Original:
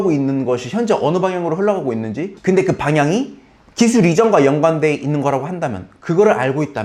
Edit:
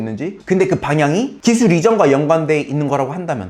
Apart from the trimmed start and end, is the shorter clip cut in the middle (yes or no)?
yes